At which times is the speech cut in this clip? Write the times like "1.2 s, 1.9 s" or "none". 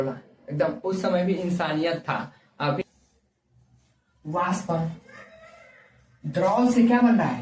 2.8 s